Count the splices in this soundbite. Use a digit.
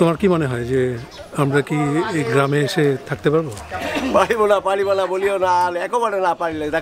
1